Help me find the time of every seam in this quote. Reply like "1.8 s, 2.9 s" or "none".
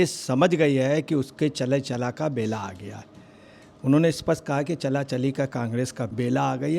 none